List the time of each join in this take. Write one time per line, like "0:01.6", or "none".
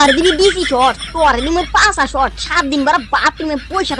none

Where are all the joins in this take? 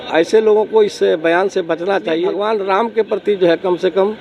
0:02.3

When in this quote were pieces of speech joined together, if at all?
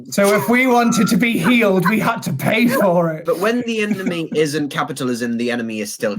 0:03.2

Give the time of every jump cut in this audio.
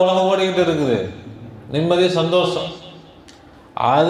none

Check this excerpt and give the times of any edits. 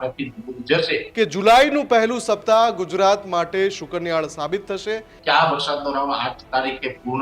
0:01.1
0:05.1

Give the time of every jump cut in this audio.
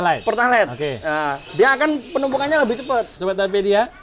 0:03.1

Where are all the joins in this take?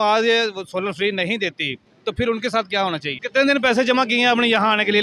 0:03.1

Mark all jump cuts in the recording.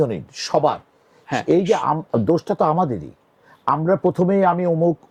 none

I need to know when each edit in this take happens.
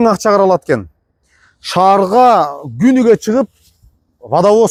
none

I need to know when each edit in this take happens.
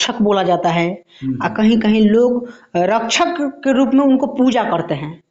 none

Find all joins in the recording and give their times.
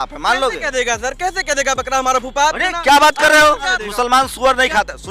0:03.8

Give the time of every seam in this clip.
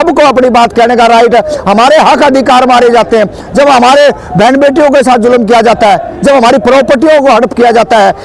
none

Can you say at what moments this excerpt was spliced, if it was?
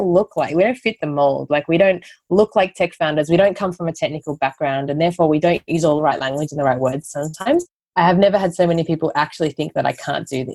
none

